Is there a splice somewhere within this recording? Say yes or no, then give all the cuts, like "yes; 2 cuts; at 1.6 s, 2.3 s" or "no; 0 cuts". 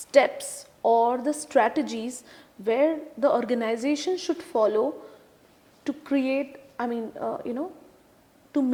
no; 0 cuts